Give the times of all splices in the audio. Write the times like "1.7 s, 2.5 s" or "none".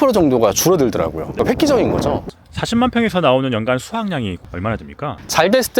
1.3 s, 2.2 s